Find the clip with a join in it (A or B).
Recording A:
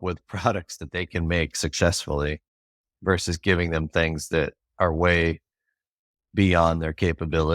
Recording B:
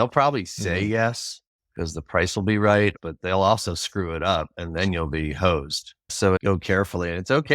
B